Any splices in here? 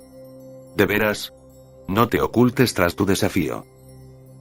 no; 0 cuts

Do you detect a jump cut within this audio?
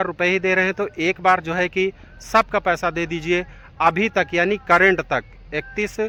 no; 0 cuts

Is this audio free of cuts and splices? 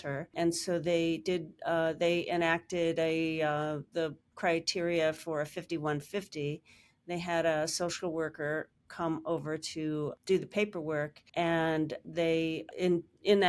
yes; 0 cuts

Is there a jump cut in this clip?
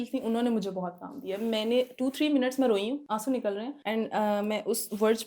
yes; 2 cuts; at 3.0 s, 3.8 s

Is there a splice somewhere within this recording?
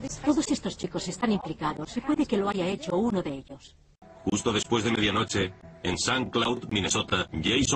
no; 0 cuts

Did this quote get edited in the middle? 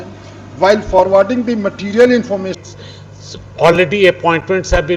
yes; 1 cut; at 2.7 s

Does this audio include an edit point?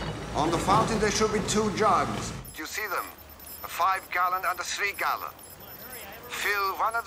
no; 0 cuts

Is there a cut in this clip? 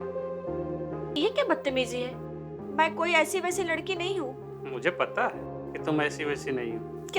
yes; 1 cut; at 1.1 s

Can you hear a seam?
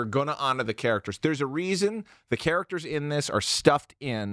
no; 0 cuts

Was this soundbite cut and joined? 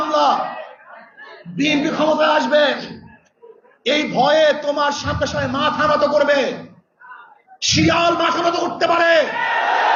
no; 0 cuts

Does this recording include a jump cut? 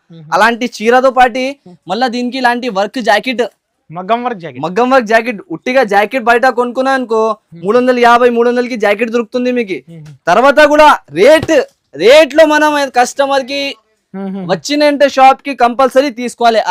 no; 0 cuts

